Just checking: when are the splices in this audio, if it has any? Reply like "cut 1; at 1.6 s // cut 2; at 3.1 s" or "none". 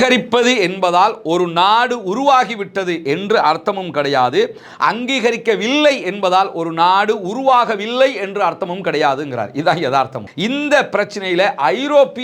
cut 1; at 10.2 s